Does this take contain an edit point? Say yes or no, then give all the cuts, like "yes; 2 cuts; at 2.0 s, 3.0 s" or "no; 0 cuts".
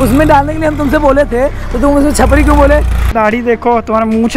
yes; 1 cut; at 3.1 s